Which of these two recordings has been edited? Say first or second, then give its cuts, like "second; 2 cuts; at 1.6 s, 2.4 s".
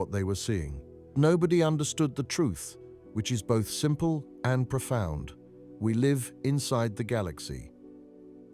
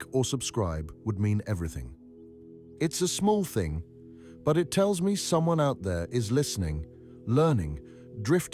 first; 1 cut; at 1.1 s